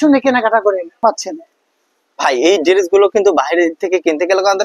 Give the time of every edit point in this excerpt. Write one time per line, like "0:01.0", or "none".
0:01.0